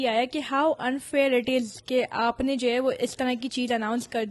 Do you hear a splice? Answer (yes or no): no